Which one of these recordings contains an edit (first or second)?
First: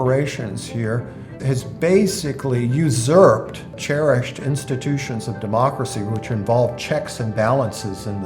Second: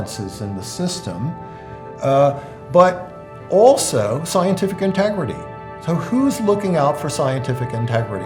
first